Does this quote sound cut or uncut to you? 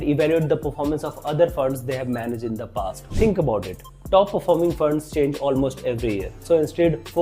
cut